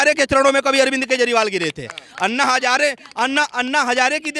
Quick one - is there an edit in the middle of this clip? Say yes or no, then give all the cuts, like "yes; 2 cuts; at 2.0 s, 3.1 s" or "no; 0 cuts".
no; 0 cuts